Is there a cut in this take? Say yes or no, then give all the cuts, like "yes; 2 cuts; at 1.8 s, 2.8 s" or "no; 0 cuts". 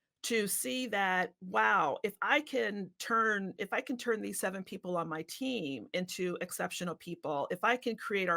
no; 0 cuts